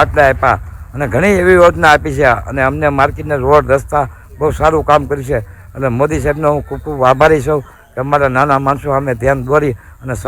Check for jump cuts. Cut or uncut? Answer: uncut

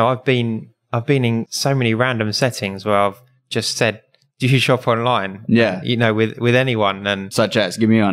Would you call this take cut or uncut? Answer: cut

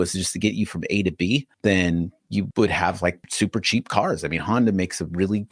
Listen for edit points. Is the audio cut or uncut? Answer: uncut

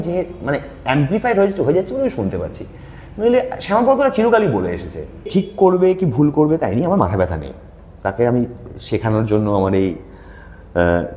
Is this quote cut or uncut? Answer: cut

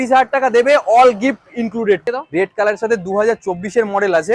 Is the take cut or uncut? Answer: cut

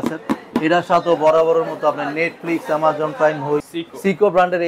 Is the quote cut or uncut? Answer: cut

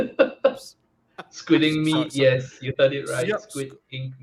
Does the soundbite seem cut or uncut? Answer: uncut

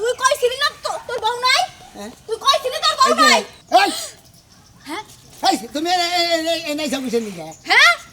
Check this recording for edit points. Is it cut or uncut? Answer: cut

